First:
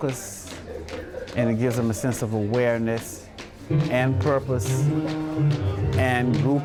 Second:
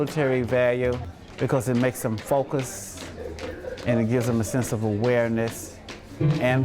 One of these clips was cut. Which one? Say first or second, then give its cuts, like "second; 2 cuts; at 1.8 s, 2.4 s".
second; 1 cut; at 1.1 s